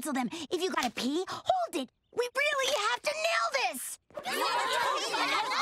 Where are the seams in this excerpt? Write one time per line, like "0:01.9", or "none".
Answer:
0:04.0